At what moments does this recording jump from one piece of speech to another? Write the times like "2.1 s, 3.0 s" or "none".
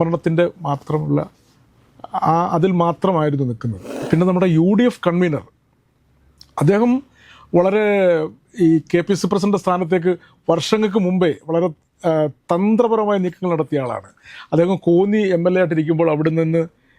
3.9 s